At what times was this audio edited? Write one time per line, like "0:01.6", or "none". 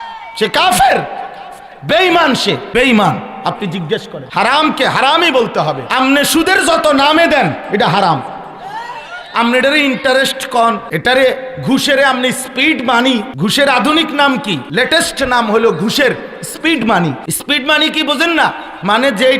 0:02.6
0:04.2
0:05.8
0:10.9
0:13.3
0:14.6
0:17.3